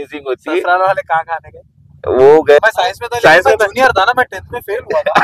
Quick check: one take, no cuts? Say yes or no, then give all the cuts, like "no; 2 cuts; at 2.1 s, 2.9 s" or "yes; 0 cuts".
no; 1 cut; at 2.6 s